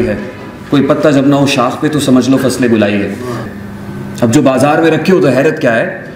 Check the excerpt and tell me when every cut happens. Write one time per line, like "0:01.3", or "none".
0:03.5